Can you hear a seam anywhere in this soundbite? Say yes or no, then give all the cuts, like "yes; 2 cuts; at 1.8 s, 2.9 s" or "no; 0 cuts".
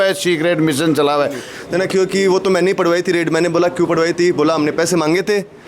yes; 1 cut; at 1.5 s